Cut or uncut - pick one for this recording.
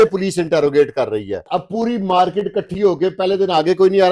cut